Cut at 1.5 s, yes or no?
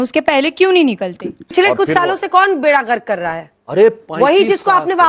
yes